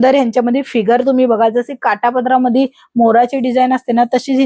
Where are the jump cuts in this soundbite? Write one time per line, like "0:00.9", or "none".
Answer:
none